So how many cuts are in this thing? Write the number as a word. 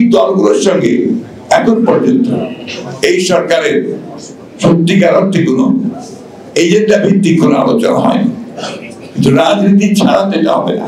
zero